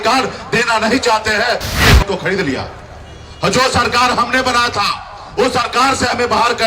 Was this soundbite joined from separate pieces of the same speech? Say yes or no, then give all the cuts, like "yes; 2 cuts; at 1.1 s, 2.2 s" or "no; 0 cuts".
yes; 1 cut; at 2.0 s